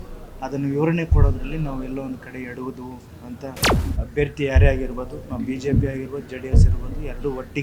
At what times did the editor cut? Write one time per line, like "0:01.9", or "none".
0:03.7